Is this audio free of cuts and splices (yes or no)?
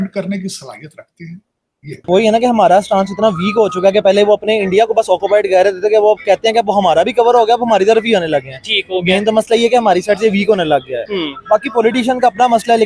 no